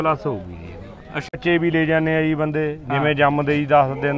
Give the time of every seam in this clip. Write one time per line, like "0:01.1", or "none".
0:01.3

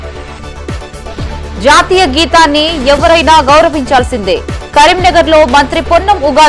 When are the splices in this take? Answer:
0:01.4

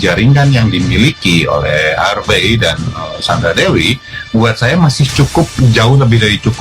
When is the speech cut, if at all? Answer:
none

